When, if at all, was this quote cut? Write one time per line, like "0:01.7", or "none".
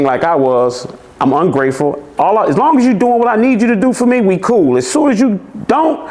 none